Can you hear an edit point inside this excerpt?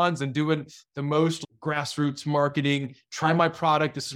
yes; 1 cut; at 1.4 s

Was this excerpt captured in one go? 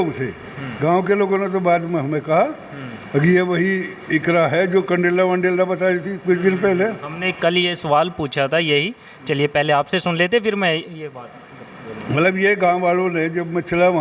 yes; 0 cuts

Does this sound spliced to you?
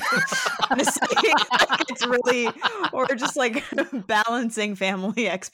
no; 0 cuts

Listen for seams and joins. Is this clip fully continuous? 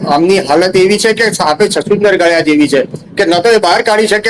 yes; 0 cuts

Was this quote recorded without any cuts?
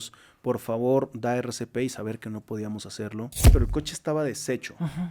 no; 1 cut; at 3.5 s

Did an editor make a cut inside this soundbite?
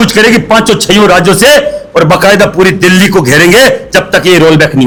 no; 0 cuts

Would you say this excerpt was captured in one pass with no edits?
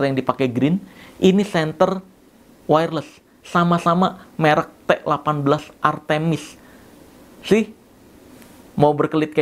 yes; 0 cuts

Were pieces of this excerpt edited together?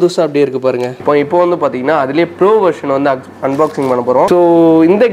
yes; 2 cuts; at 1.0 s, 4.4 s

